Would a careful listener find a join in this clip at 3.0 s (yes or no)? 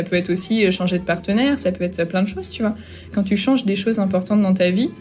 yes